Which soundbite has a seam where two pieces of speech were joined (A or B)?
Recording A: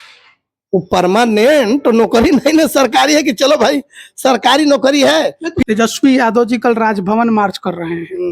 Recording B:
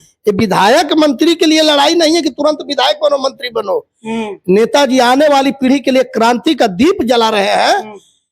A